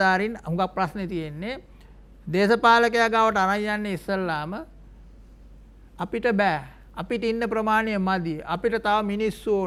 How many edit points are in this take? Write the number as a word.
zero